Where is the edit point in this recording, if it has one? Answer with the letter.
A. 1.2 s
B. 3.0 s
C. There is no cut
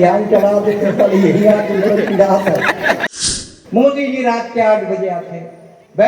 B